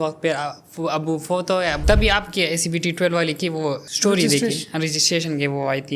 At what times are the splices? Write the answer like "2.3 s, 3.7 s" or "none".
1.8 s, 3.8 s